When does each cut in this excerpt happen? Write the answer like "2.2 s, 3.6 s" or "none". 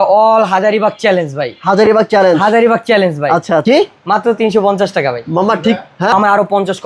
3.6 s, 6.1 s